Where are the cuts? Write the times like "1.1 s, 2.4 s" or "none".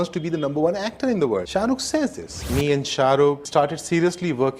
1.5 s, 2.4 s